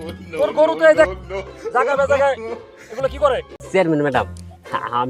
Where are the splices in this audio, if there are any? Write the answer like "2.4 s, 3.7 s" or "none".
3.5 s